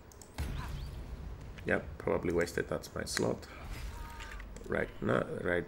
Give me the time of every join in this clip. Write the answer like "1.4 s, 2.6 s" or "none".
none

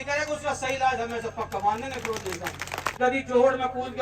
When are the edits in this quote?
2.8 s

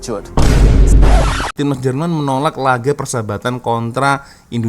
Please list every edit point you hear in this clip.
1.1 s

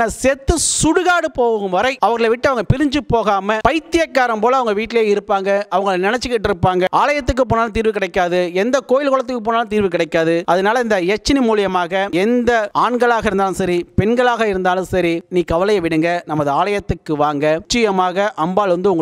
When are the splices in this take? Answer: 6.9 s, 10.4 s, 15.2 s, 17.6 s

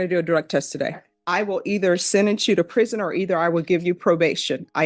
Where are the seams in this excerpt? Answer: 1.1 s

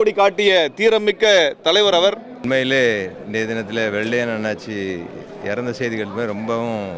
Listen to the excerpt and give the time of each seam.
2.3 s

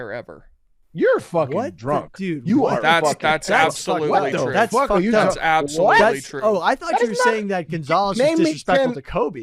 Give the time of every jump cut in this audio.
none

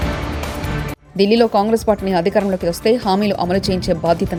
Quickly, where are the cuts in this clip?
none

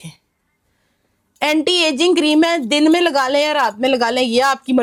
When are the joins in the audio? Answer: none

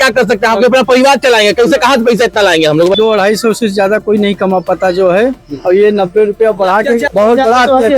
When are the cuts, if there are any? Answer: 3.0 s, 7.1 s

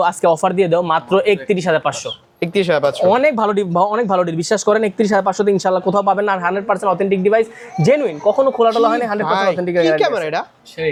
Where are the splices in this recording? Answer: none

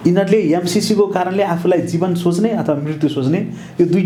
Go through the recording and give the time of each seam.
none

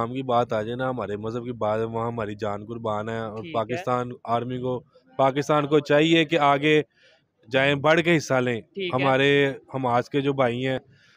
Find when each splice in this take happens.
none

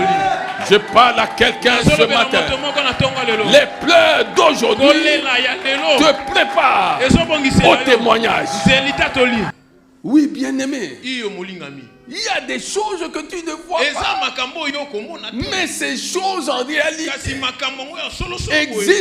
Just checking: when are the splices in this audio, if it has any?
9.5 s

